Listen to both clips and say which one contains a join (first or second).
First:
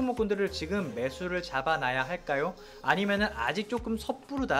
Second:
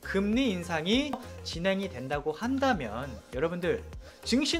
second